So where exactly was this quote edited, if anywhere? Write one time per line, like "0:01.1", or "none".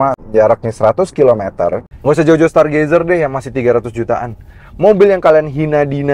0:01.9